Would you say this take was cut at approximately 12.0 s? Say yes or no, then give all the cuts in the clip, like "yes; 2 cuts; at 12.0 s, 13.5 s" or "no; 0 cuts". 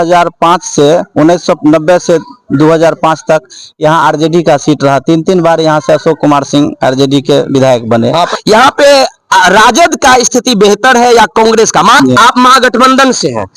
yes; 2 cuts; at 8.3 s, 12.0 s